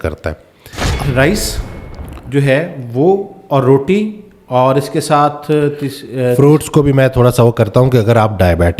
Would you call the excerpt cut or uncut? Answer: cut